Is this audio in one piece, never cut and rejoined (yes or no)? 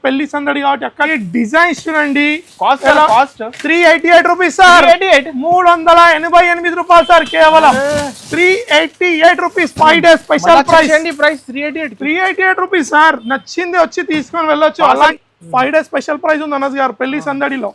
no